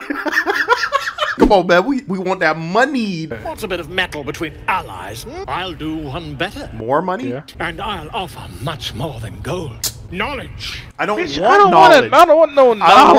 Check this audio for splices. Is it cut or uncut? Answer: cut